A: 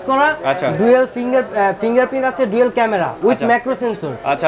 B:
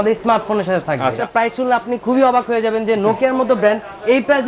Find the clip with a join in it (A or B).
B